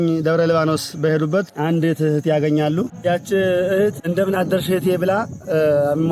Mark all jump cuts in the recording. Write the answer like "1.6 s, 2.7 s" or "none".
1.5 s, 2.9 s, 4.0 s